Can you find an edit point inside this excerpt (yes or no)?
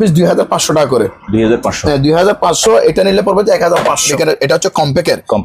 yes